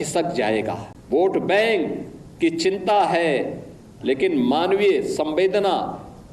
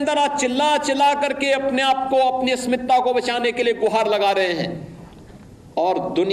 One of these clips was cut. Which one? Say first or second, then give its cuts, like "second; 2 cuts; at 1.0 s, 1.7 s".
first; 1 cut; at 0.9 s